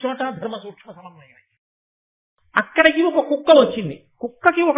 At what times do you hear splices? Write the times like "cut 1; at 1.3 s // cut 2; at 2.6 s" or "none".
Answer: cut 1; at 2.1 s